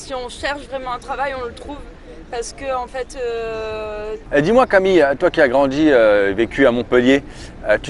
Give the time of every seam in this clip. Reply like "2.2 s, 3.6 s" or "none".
4.1 s

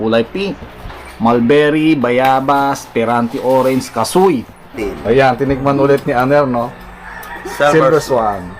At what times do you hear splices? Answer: 4.8 s

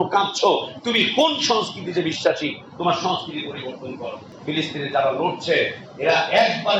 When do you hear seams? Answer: 4.2 s

